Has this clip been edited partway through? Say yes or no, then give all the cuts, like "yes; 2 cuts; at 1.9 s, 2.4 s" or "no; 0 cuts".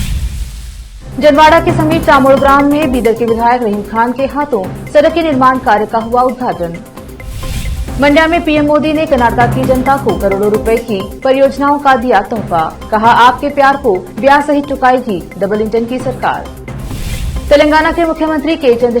yes; 1 cut; at 0.9 s